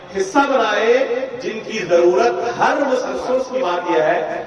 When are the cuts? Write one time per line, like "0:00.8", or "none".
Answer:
0:03.3